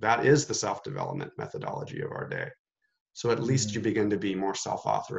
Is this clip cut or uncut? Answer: uncut